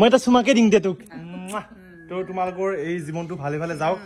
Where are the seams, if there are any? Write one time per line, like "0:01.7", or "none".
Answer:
none